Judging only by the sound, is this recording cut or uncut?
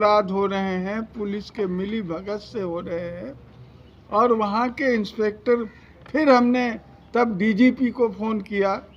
uncut